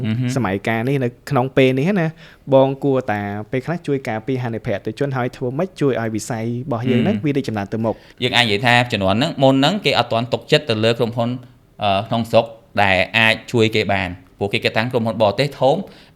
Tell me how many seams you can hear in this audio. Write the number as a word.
one